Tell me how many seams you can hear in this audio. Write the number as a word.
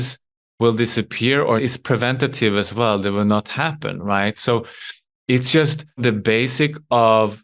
two